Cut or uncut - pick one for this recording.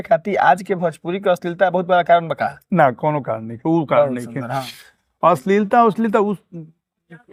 uncut